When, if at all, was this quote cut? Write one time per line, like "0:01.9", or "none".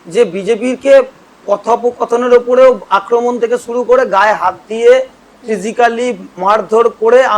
none

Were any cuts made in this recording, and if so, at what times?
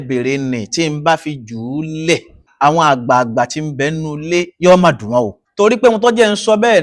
0:02.5
0:05.4

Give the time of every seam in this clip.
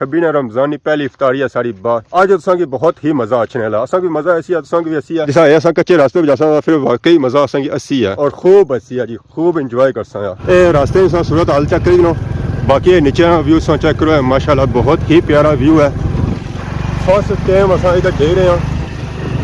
0:02.0
0:10.4

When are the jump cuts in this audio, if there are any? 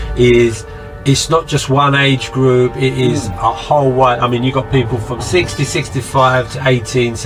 none

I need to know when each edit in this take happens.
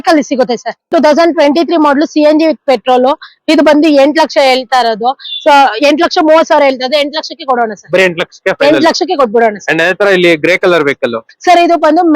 0:00.9

